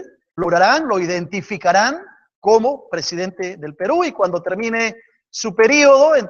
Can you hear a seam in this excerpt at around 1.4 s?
yes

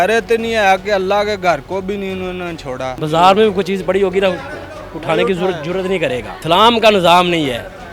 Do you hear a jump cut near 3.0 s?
yes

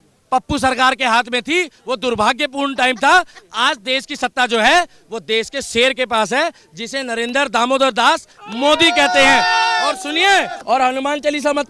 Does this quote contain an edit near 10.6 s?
yes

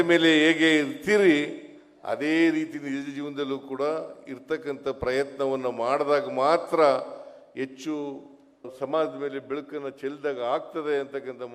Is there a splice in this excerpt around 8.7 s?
yes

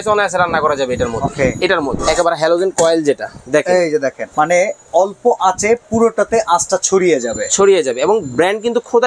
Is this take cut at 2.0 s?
yes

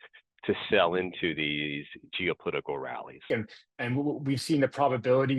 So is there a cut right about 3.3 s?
yes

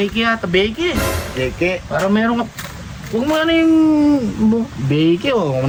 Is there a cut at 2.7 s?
no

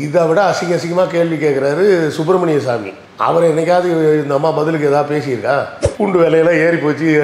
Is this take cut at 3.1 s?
no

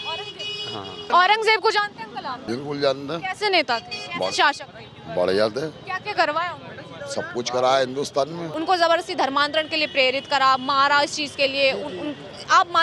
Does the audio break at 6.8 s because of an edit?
no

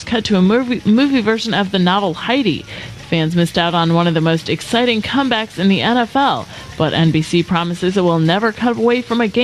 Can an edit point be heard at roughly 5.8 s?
no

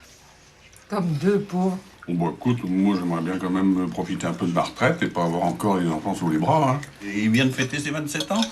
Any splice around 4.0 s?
no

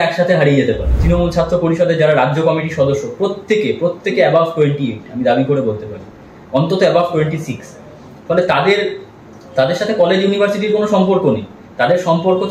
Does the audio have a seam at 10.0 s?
no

